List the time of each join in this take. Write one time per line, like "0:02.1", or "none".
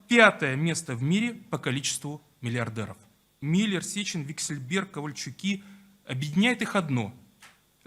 0:03.4